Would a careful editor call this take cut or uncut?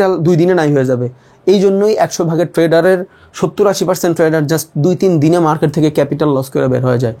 uncut